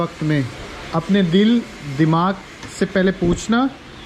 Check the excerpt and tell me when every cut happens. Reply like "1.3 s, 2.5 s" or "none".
none